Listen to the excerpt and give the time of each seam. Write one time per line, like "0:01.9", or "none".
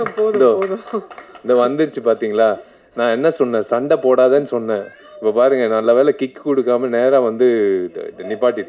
none